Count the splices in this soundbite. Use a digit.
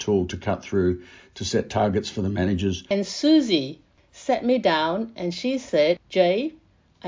3